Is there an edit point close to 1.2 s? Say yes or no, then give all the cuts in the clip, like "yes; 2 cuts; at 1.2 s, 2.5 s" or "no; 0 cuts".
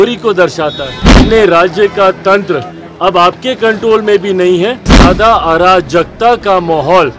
yes; 2 cuts; at 1.2 s, 5.0 s